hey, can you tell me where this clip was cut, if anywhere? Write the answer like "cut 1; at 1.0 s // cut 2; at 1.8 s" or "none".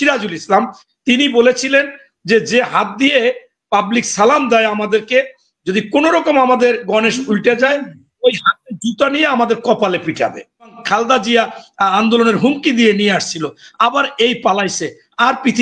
cut 1; at 10.8 s